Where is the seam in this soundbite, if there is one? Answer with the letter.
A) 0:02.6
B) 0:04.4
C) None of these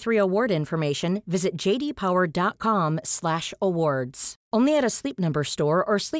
C